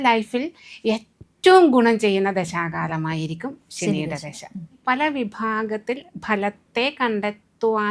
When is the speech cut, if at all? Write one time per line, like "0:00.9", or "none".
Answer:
0:04.8